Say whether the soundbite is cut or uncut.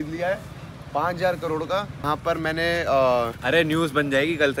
cut